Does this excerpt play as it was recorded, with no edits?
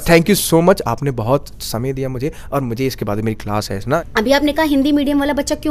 no; 1 cut; at 4.0 s

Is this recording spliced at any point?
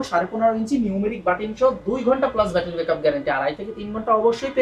no; 0 cuts

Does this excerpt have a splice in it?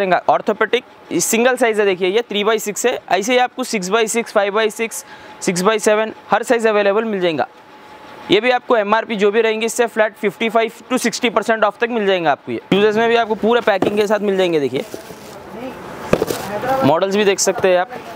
no; 0 cuts

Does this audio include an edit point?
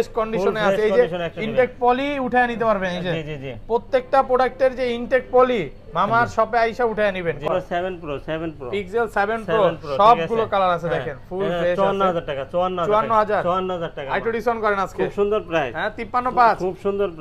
yes; 1 cut; at 7.5 s

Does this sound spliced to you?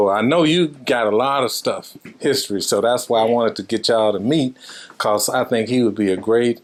no; 0 cuts

